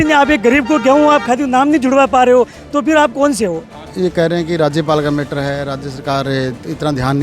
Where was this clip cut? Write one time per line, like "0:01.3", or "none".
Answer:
0:03.8